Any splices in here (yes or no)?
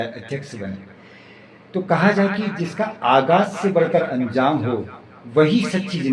no